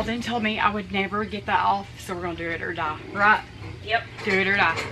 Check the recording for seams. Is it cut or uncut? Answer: uncut